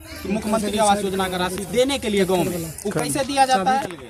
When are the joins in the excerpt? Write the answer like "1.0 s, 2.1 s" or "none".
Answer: none